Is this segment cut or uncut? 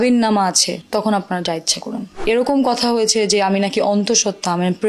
uncut